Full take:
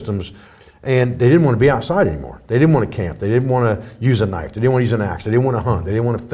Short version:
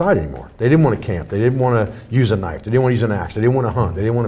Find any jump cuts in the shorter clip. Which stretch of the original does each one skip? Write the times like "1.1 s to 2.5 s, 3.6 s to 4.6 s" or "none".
none